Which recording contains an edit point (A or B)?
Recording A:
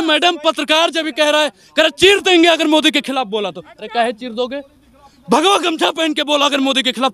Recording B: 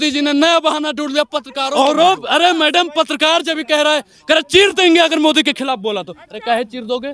B